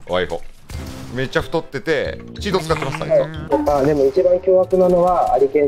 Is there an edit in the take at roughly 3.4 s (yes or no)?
yes